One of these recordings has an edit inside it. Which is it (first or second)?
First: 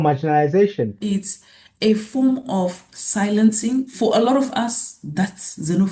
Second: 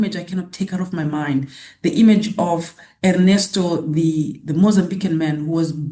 first